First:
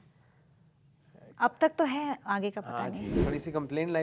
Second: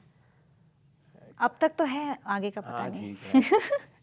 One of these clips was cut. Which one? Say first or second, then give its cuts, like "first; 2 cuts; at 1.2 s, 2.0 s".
first; 1 cut; at 3.1 s